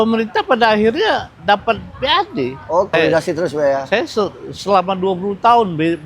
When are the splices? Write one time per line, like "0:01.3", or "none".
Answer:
0:02.9